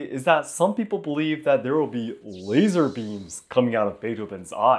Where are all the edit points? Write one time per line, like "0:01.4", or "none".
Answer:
none

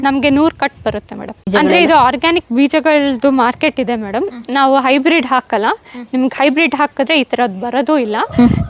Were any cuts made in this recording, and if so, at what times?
0:01.5

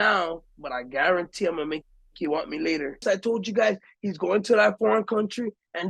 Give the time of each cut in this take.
0:03.0

